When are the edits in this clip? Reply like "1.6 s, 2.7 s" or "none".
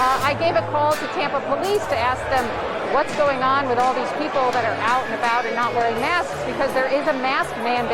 2.6 s